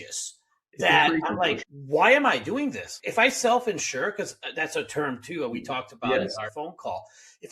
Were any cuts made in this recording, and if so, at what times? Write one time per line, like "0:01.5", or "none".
0:01.6